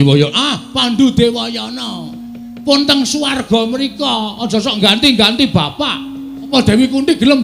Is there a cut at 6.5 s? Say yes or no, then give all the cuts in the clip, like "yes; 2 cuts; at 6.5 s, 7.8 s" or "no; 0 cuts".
yes; 1 cut; at 6.5 s